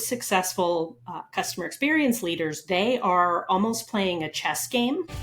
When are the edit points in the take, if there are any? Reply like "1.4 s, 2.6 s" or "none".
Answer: none

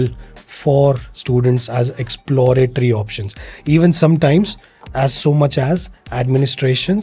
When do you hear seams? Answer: none

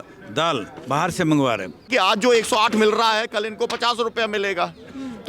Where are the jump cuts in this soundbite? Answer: 1.9 s

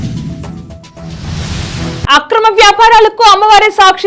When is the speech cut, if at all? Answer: 2.1 s

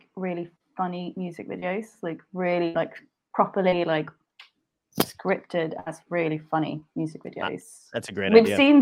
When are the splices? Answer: none

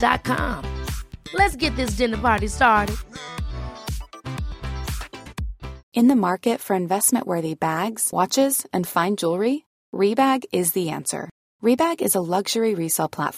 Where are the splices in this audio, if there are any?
5.8 s

